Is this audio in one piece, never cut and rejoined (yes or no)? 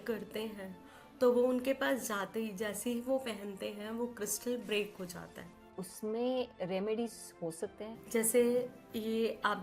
no